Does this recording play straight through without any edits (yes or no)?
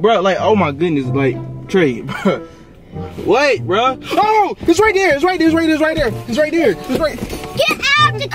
yes